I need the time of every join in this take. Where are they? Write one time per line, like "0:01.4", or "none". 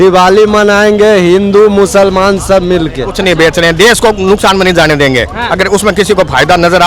0:03.1